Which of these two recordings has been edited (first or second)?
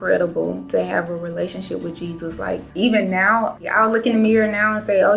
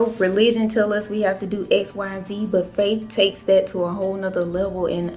first